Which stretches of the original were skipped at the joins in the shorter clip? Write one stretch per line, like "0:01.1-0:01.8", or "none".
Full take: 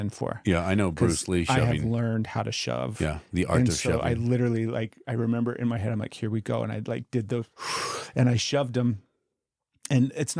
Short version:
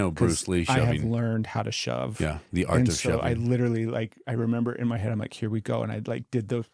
none